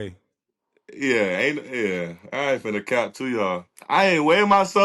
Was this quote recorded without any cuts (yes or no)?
no